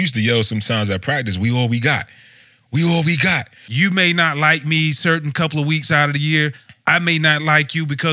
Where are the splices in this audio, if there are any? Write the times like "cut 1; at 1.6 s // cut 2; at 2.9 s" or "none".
cut 1; at 3.6 s